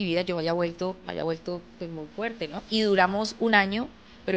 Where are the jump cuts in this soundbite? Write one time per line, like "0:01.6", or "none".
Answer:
0:02.6